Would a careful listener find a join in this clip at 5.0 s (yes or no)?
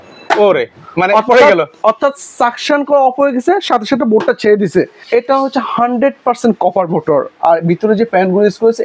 yes